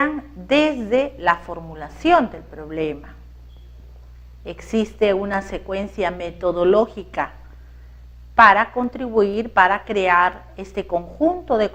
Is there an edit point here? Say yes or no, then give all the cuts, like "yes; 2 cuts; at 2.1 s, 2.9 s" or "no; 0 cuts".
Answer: no; 0 cuts